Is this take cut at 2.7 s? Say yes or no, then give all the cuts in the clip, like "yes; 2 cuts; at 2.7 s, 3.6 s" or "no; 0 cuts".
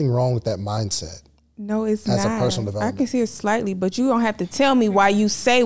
yes; 1 cut; at 2.7 s